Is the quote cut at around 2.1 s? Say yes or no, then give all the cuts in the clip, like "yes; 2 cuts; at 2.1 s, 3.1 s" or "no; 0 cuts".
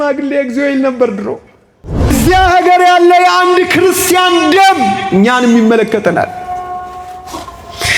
yes; 1 cut; at 2.1 s